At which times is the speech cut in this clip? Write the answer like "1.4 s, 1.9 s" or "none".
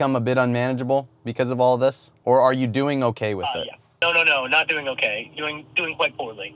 2.1 s, 4.0 s